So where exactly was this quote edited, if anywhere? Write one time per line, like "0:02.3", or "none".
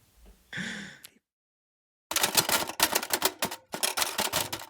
0:01.3